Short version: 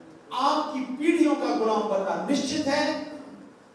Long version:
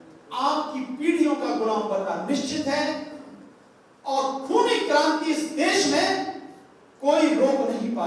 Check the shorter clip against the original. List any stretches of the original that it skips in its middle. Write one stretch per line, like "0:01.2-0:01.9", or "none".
none